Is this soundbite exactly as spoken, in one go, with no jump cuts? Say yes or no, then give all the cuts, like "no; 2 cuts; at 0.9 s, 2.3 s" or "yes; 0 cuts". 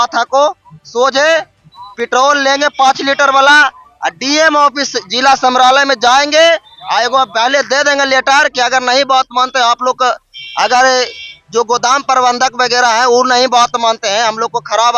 yes; 0 cuts